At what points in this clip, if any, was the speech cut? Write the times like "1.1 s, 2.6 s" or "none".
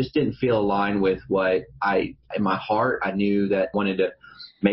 2.2 s, 3.7 s

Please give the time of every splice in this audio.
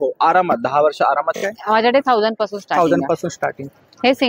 1.4 s

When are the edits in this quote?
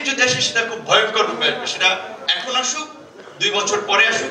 none

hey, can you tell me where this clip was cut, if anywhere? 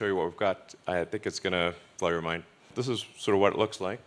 1.9 s, 2.6 s

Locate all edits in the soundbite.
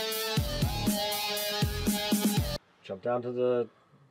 2.5 s

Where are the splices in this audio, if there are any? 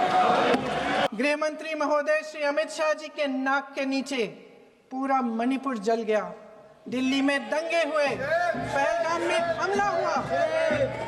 1.1 s

